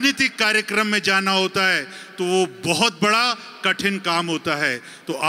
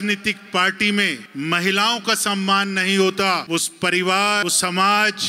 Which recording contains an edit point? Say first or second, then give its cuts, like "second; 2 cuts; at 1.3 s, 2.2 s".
second; 3 cuts; at 1.2 s, 3.4 s, 4.4 s